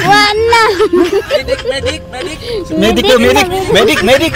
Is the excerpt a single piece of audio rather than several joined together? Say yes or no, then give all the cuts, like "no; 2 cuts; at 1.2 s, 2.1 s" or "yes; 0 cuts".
yes; 0 cuts